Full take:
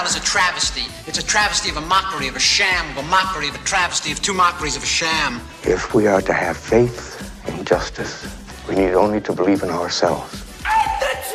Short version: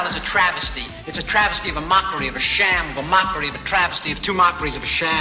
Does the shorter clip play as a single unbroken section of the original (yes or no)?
yes